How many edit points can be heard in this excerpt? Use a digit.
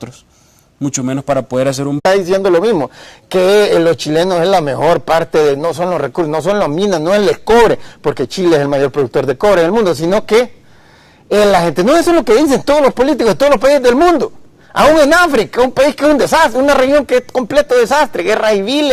0